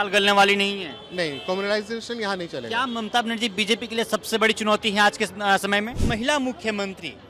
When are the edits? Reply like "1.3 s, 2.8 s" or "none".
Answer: 6.0 s